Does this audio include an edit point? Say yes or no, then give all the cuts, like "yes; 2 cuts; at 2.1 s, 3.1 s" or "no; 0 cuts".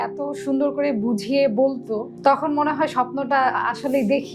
no; 0 cuts